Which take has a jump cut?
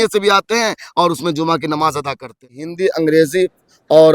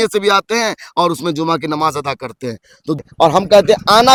first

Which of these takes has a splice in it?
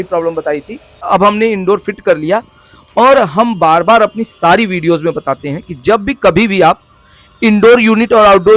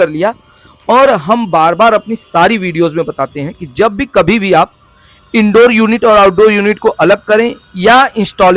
first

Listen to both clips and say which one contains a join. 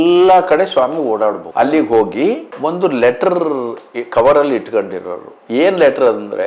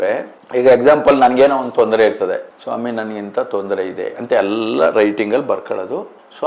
first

